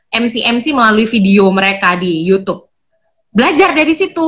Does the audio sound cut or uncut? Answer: uncut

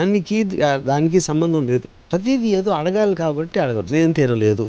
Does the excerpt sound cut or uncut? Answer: cut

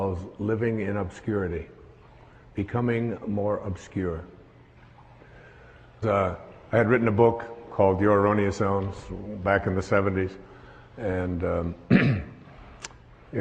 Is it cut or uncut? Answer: uncut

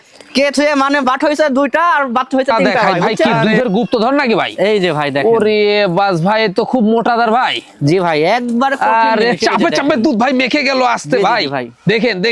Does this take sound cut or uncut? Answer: cut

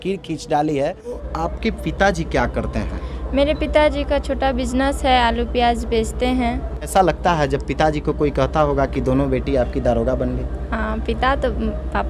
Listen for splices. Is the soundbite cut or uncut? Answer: cut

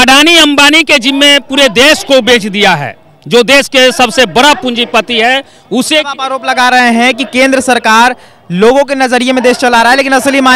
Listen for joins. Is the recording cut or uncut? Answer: uncut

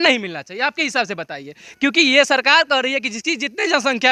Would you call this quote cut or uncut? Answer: uncut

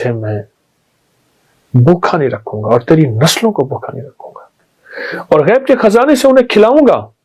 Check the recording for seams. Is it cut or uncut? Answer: cut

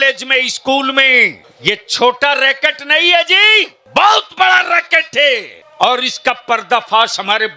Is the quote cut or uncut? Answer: cut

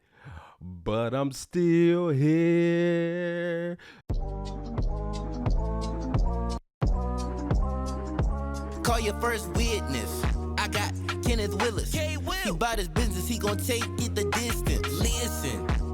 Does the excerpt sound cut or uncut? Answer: cut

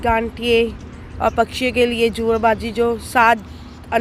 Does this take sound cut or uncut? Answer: uncut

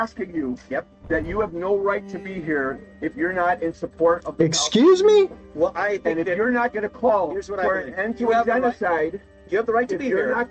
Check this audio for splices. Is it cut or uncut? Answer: uncut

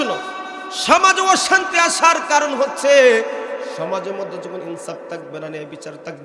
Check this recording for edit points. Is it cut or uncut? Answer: uncut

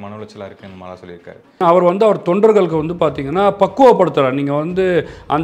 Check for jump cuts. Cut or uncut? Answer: cut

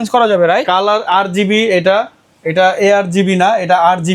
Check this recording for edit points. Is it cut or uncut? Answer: uncut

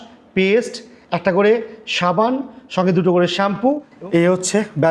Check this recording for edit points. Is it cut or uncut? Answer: cut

